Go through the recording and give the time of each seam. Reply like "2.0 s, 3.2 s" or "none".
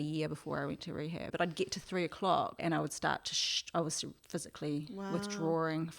1.3 s, 2.6 s